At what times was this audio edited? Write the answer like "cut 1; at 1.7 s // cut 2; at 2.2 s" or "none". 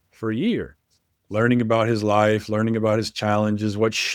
none